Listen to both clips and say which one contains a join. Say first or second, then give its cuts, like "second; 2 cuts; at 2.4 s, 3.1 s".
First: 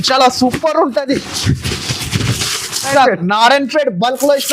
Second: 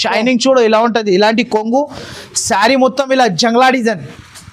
first; 1 cut; at 2.9 s